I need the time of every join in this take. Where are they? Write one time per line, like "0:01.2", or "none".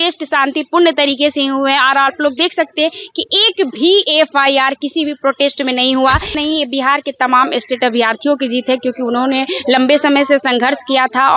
0:06.3